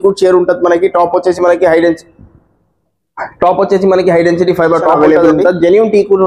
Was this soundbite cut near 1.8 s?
no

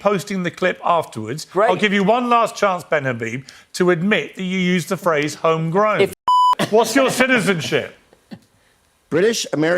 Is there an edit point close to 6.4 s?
yes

